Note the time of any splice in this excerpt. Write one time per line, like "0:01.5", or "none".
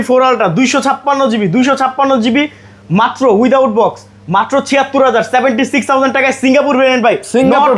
none